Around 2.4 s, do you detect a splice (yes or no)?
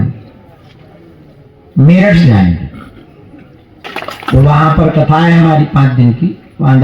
no